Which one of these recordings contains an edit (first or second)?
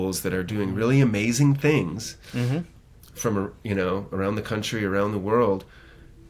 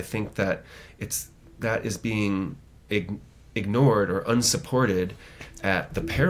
first